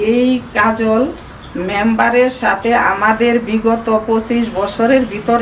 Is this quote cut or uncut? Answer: uncut